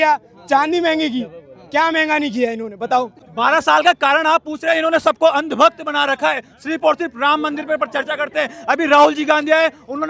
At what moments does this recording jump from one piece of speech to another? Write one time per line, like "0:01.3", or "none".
0:03.2

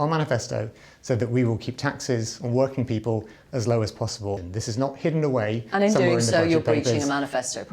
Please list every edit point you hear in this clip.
0:04.4

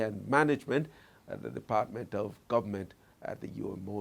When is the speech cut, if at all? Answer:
none

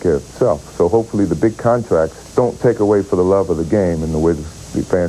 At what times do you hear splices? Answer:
0:02.2

